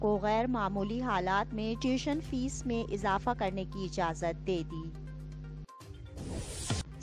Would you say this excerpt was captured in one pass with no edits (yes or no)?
no